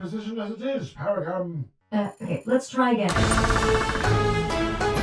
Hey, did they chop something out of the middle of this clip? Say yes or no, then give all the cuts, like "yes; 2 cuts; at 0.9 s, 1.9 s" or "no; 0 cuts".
yes; 1 cut; at 3.1 s